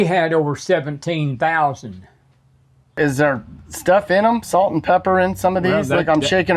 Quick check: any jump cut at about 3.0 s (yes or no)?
yes